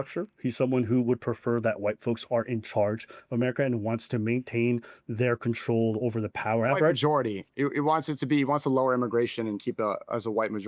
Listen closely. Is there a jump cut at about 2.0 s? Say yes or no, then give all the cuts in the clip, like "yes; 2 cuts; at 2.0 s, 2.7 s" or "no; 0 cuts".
no; 0 cuts